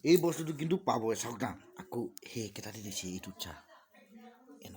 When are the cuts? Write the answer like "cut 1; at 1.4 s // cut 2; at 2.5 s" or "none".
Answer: none